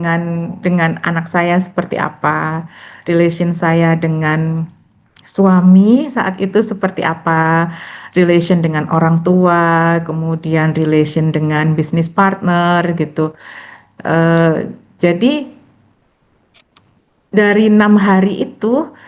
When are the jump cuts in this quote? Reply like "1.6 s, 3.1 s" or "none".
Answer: none